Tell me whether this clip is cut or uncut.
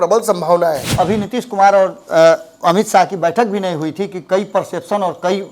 cut